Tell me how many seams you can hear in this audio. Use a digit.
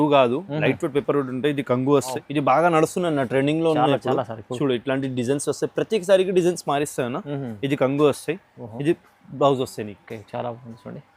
1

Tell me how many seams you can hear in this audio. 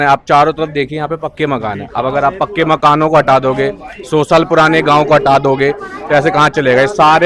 0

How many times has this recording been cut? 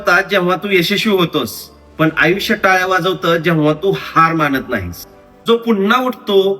1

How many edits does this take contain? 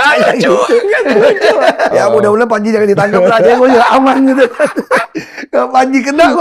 1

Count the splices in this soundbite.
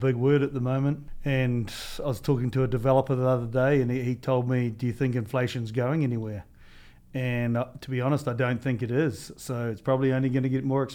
1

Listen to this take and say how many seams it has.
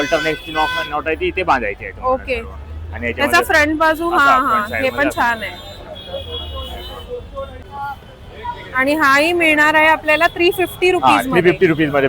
1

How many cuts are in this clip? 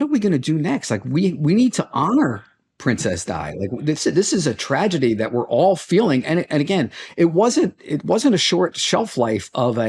0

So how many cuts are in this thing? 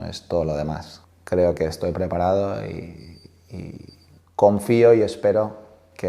1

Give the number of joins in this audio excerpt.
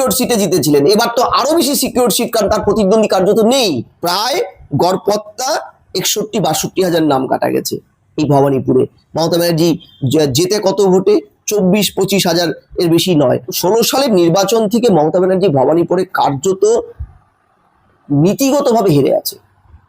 2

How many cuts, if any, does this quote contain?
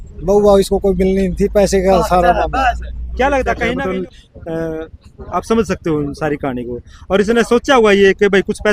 1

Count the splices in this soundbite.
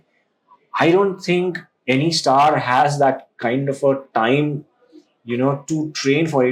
0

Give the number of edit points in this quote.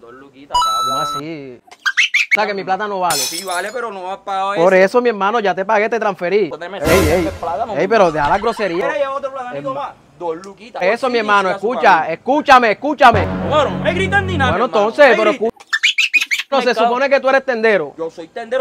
4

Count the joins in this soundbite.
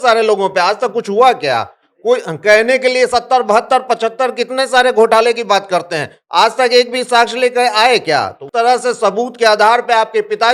1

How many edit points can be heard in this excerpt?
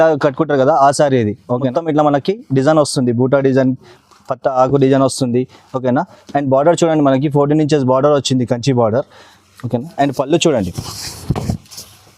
1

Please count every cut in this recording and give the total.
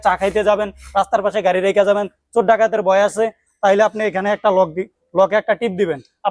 0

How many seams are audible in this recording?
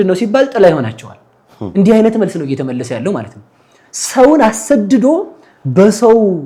0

